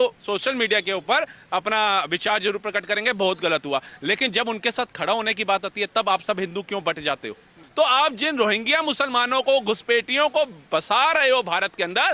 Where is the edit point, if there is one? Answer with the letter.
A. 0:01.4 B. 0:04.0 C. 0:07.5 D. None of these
C